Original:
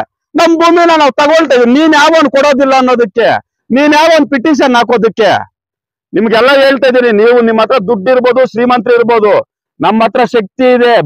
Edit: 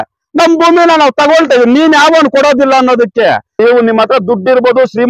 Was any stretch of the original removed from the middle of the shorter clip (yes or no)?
yes